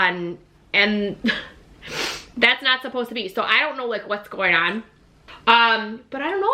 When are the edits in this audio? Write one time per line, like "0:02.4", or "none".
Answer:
0:05.3